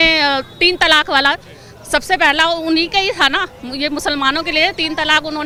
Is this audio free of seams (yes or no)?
yes